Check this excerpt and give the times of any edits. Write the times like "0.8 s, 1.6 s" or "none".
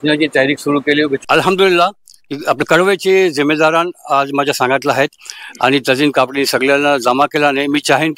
1.2 s